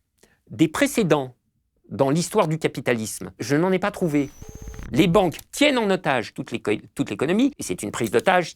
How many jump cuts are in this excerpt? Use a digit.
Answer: 3